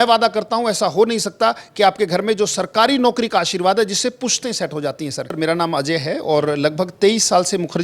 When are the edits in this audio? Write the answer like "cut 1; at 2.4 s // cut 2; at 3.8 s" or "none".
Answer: cut 1; at 5.3 s